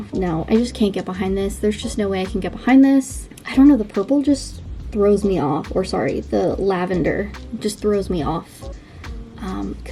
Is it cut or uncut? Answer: uncut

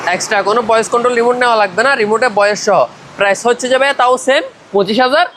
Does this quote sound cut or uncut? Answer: uncut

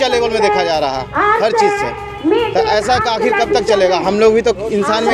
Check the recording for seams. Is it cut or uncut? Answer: uncut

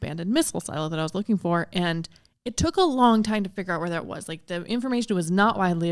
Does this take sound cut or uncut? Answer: uncut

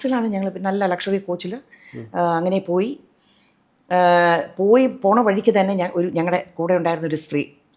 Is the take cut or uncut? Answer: uncut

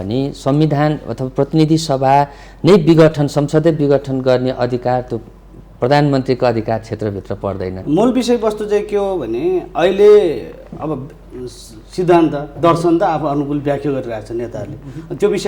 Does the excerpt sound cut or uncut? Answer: cut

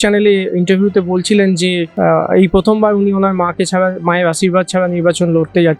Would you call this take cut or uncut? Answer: cut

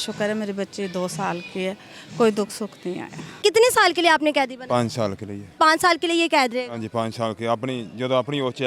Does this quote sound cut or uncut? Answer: cut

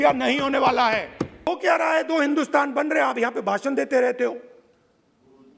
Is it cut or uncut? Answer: cut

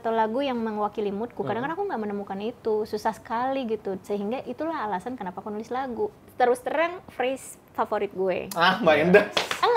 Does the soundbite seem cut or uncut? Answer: cut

